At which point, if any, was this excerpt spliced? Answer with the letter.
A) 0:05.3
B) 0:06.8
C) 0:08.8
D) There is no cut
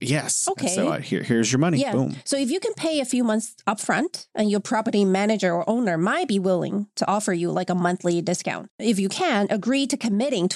C